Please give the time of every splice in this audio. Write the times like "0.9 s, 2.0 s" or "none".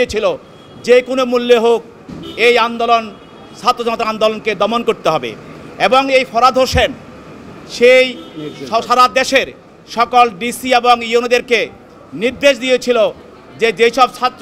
none

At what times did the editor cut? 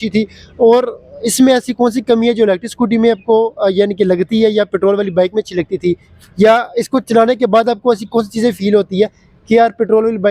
none

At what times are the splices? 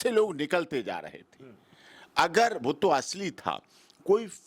none

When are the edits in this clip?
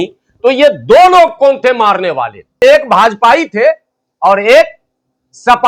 2.6 s

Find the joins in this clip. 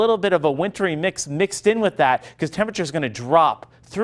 none

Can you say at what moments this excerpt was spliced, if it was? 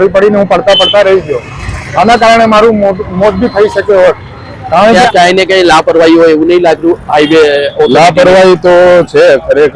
5.0 s

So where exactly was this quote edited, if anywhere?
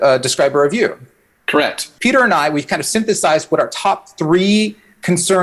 1.9 s

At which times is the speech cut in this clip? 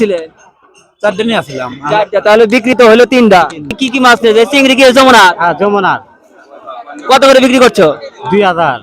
3.8 s

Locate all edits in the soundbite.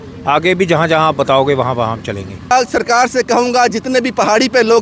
2.5 s

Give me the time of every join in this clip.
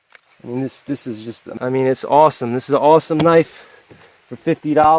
1.5 s

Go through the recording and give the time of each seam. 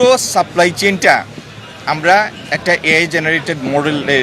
none

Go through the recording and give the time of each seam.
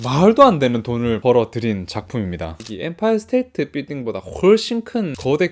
2.5 s

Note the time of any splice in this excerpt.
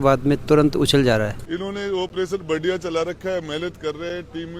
1.4 s

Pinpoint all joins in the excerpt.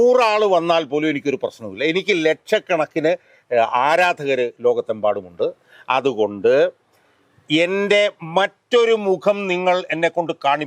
none

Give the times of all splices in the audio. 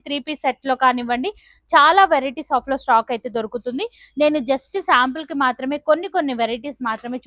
none

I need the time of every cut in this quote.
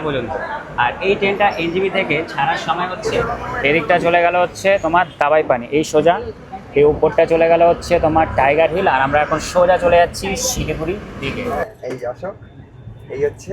3.0 s, 11.5 s

